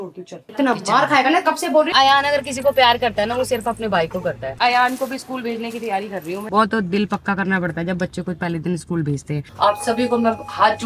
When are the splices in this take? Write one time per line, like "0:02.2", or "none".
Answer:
0:01.9
0:04.5
0:06.5
0:09.5